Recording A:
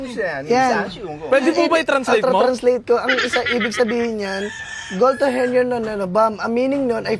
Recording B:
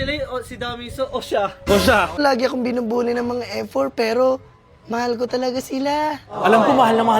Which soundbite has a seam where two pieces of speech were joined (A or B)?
B